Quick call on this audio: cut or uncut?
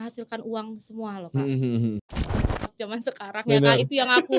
cut